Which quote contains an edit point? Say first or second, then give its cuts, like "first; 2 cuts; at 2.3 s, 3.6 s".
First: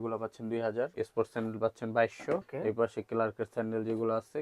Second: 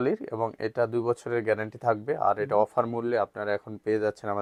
first; 2 cuts; at 0.9 s, 2.5 s